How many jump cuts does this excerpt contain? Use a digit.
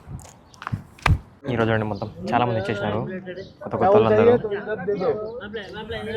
1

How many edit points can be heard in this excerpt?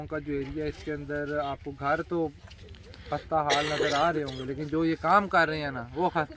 0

